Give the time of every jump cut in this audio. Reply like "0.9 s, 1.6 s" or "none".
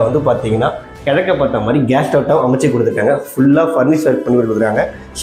none